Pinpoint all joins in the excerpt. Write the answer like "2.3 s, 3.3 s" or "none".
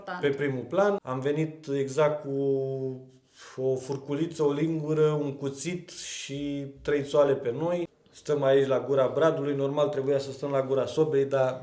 1.1 s, 8.1 s